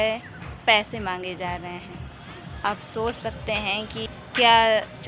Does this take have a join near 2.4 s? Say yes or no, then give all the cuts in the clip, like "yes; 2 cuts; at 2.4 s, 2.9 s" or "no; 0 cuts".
no; 1 cut; at 4.1 s